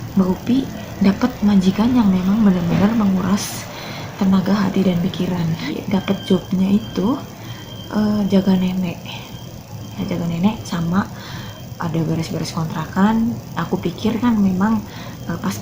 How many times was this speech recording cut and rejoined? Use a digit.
1